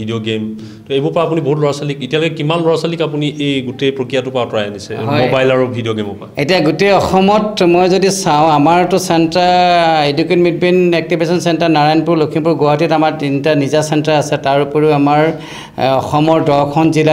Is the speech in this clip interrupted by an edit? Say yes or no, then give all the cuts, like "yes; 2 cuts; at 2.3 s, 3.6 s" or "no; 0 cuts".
no; 0 cuts